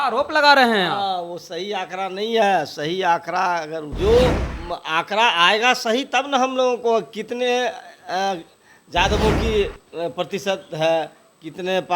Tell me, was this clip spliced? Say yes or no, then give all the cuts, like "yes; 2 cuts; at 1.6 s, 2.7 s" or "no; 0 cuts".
yes; 1 cut; at 3.8 s